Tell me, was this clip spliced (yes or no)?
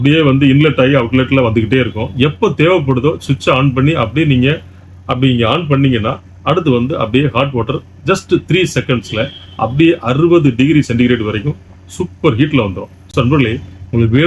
no